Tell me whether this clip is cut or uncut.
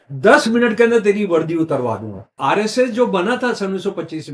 cut